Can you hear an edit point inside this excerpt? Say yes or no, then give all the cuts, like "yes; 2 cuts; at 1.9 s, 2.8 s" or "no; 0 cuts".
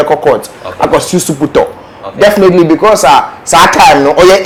no; 0 cuts